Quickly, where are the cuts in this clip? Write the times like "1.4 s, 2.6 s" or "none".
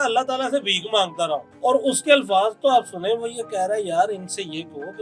1.5 s